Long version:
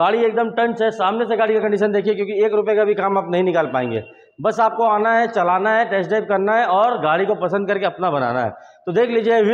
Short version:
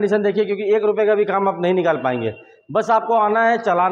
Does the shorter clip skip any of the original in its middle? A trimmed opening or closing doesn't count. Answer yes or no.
no